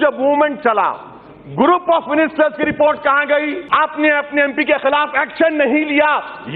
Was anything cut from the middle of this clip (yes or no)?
yes